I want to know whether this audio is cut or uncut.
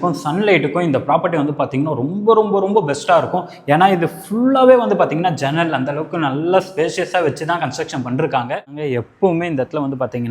cut